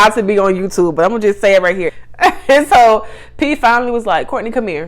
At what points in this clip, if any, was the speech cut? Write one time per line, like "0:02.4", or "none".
0:01.8